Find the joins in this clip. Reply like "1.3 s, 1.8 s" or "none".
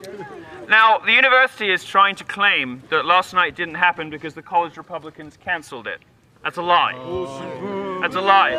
6.4 s